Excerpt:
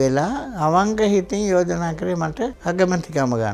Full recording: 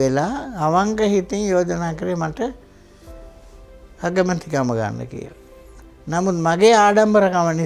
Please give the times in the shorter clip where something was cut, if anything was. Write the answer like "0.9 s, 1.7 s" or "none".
2.6 s